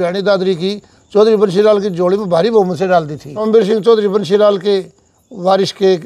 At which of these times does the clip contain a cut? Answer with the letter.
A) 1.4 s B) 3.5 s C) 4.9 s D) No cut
B